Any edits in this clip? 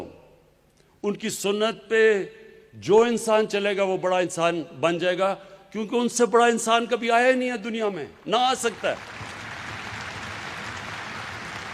no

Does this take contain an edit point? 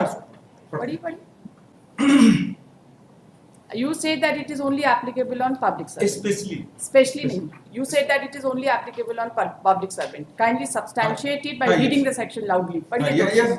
no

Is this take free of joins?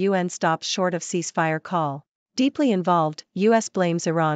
no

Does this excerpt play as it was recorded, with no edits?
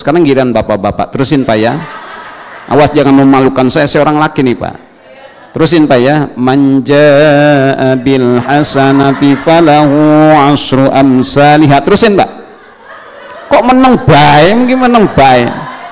yes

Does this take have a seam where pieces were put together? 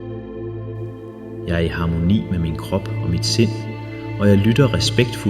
yes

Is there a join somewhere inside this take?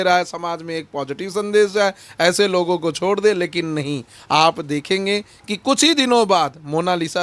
no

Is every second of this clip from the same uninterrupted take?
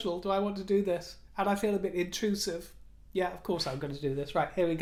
yes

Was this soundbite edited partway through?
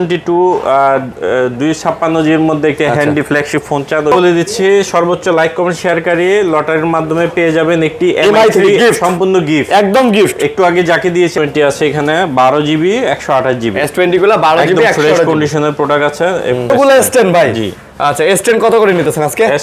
yes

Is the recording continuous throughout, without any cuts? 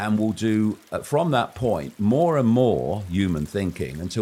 yes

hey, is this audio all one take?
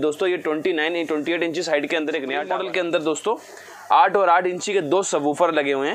no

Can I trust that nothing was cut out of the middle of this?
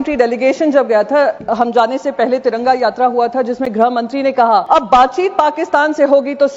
no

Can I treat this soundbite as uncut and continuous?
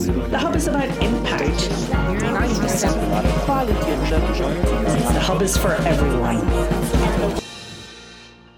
no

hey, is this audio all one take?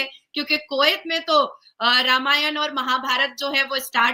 yes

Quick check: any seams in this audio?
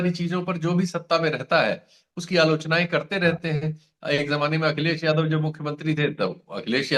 no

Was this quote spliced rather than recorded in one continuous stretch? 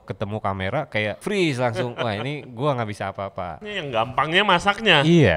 yes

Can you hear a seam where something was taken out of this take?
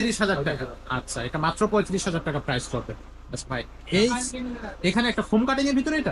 no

